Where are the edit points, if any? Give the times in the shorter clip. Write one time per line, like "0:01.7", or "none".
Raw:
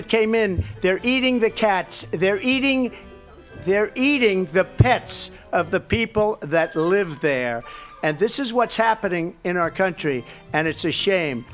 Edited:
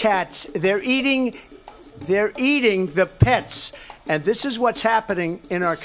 0:03.7